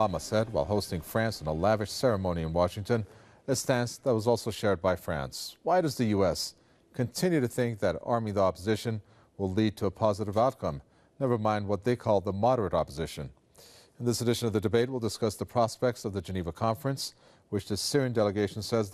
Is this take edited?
no; 0 cuts

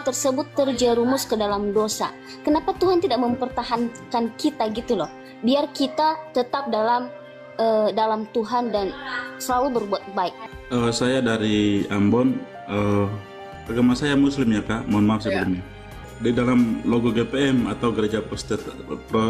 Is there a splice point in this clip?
yes; 3 cuts; at 10.4 s, 13.5 s, 16.1 s

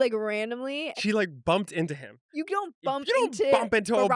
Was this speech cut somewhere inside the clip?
yes; 2 cuts; at 1.0 s, 2.2 s

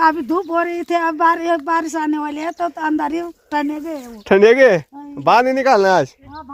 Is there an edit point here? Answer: no; 0 cuts

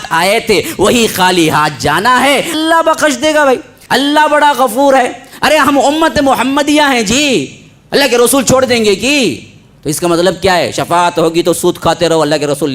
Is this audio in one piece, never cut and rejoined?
no; 2 cuts; at 2.5 s, 3.8 s

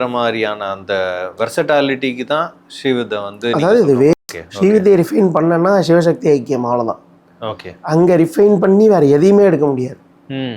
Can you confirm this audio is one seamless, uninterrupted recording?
no; 1 cut; at 4.1 s

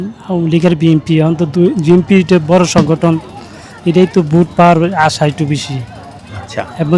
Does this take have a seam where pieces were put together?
no; 0 cuts

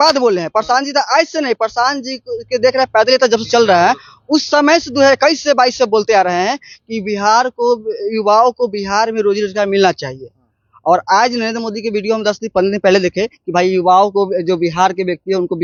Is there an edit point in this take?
no; 0 cuts

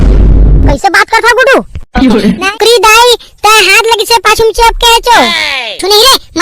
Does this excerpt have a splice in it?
yes; 1 cut; at 2.4 s

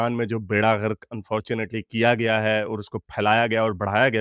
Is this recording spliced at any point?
no; 0 cuts

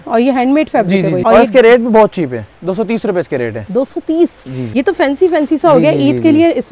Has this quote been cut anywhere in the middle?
yes; 2 cuts; at 1.2 s, 4.5 s

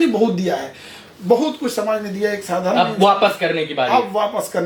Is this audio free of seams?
yes; 0 cuts

